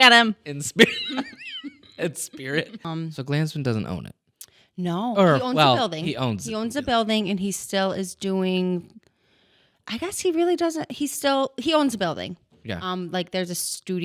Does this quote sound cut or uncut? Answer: cut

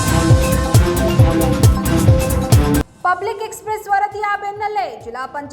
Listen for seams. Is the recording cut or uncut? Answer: cut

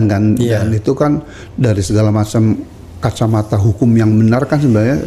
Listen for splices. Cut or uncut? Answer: uncut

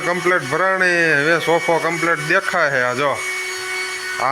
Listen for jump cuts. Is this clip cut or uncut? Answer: uncut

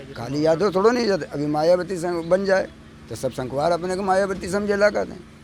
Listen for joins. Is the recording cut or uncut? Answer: uncut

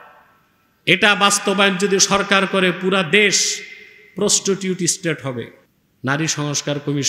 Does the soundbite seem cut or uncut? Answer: cut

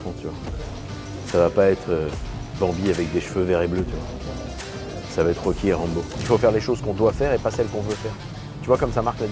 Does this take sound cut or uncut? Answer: cut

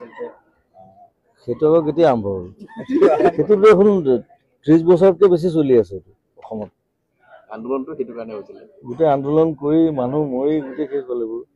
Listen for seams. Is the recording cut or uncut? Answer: cut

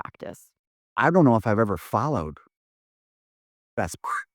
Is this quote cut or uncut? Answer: cut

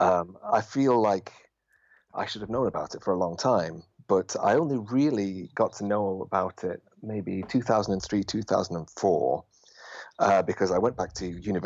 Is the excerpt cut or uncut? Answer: uncut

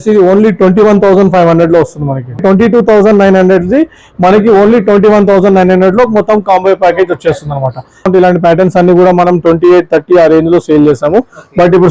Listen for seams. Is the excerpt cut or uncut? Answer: cut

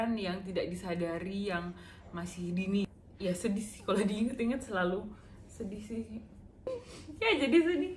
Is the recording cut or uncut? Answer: cut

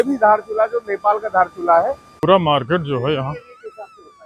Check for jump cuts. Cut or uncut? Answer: cut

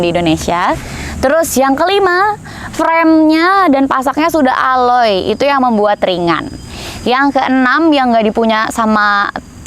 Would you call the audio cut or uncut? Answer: uncut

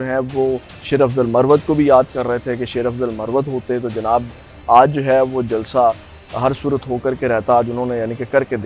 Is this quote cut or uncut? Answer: uncut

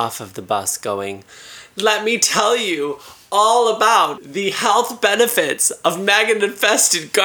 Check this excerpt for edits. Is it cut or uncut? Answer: cut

